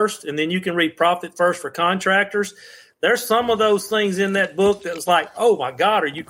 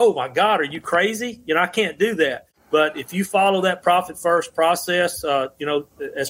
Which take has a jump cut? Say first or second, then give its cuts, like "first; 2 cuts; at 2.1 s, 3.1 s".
second; 1 cut; at 2.5 s